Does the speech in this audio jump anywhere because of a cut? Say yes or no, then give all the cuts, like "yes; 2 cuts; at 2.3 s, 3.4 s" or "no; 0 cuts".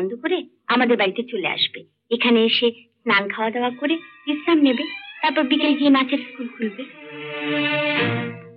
no; 0 cuts